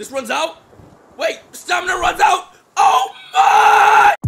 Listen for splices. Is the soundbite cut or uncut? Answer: uncut